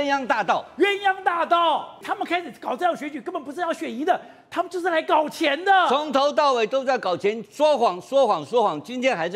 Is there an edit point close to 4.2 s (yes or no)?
no